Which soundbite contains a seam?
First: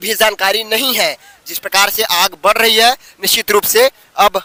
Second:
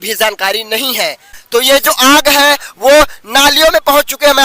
second; 1 cut; at 1.4 s

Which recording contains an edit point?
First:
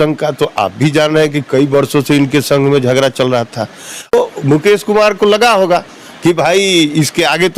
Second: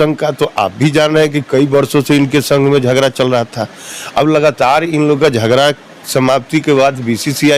first; 1 cut; at 4.1 s

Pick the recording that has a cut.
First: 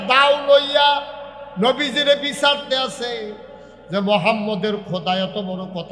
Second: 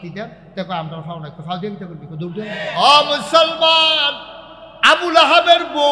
second; 1 cut; at 2.6 s

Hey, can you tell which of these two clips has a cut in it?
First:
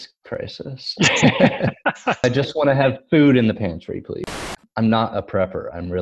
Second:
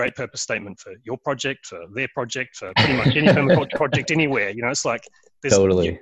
first; 2 cuts; at 2.2 s, 4.4 s

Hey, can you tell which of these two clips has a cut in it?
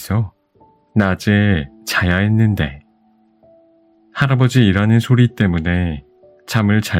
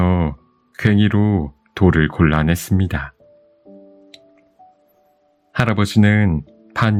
first; 2 cuts; at 2.8 s, 4.1 s

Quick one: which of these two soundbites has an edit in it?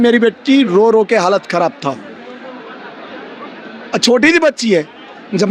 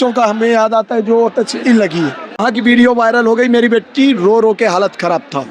second; 1 cut; at 2.4 s

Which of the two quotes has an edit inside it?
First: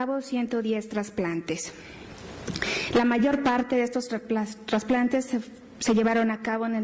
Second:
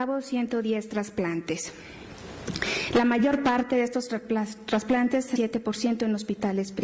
first; 1 cut; at 5.4 s

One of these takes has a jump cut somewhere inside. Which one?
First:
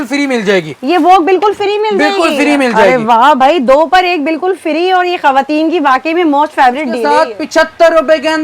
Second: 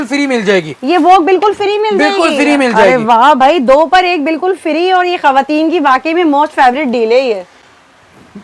first; 1 cut; at 7.2 s

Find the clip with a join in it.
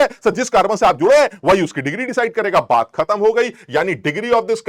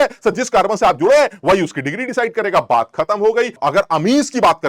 second; 1 cut; at 3.6 s

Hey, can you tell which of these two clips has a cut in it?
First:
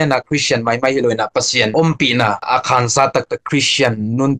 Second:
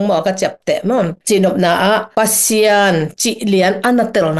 second; 1 cut; at 1.2 s

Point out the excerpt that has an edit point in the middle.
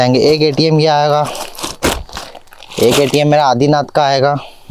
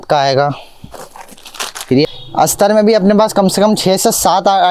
second; 1 cut; at 2.1 s

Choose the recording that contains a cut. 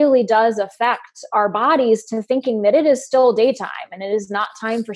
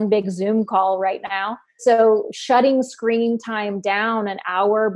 second; 1 cut; at 1.7 s

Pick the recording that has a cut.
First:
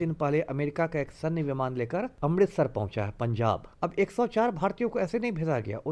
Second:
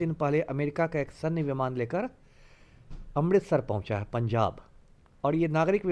first; 2 cuts; at 2.1 s, 3.7 s

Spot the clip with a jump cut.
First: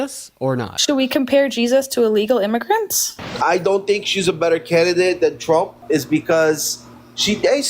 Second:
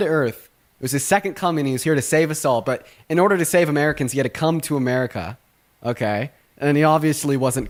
first; 2 cuts; at 3.2 s, 5.8 s

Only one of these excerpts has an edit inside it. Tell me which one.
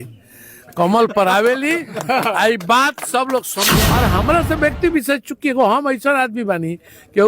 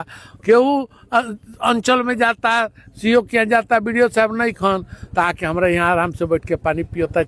first; 1 cut; at 3.6 s

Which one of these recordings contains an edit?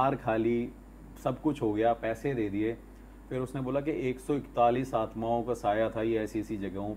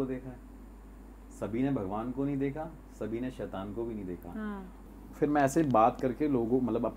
second; 1 cut; at 4.9 s

